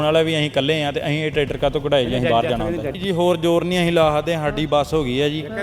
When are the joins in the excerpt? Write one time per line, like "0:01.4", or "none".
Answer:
0:02.9

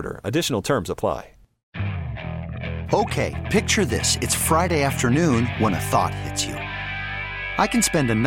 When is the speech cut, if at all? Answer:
0:01.6

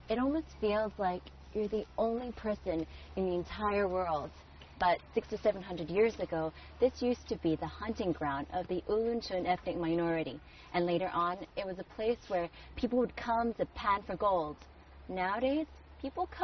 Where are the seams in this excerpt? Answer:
0:02.6

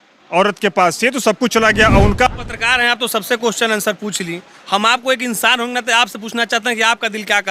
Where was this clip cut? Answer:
0:02.3

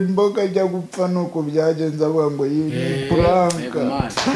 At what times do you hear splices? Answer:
none

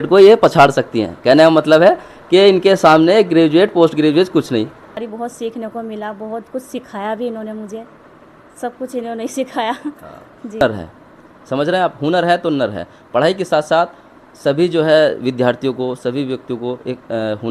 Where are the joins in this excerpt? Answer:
0:04.9
0:10.6

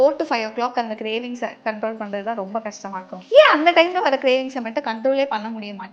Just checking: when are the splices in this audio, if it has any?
0:03.2

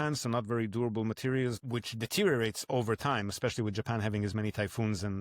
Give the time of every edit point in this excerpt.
0:01.6

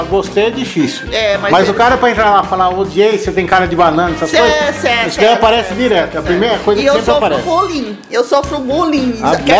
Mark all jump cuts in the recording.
none

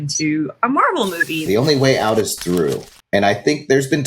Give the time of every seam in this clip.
0:01.4

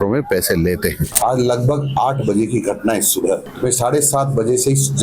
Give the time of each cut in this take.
0:01.0
0:03.5

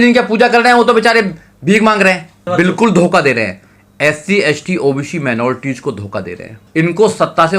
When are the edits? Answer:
0:02.4
0:06.6

